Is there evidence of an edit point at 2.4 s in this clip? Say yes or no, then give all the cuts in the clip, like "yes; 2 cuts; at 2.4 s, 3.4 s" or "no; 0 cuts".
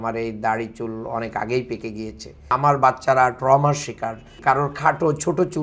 yes; 2 cuts; at 2.4 s, 4.4 s